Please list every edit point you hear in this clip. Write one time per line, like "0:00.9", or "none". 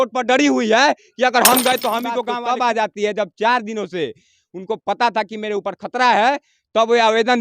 0:02.2

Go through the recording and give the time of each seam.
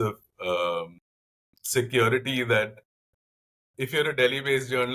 none

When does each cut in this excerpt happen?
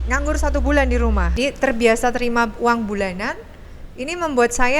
0:01.4

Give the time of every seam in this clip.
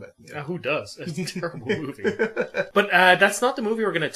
0:02.7

